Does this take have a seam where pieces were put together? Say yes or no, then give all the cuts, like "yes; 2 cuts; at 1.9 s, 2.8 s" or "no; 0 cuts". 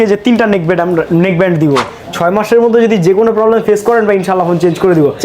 yes; 1 cut; at 2.0 s